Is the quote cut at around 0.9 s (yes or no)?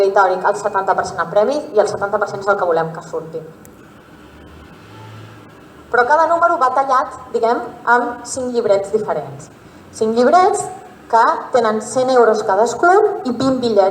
yes